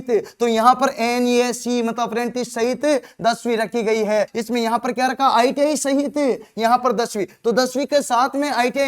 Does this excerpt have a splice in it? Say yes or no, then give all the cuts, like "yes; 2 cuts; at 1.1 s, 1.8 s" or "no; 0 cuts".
yes; 1 cut; at 4.4 s